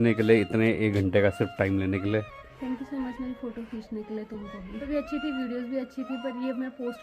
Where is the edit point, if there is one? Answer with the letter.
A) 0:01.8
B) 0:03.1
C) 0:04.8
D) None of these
C